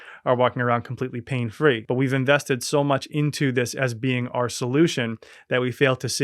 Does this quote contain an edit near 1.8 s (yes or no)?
yes